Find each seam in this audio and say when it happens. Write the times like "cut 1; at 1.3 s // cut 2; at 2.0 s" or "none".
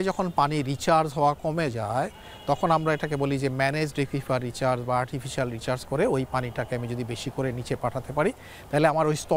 none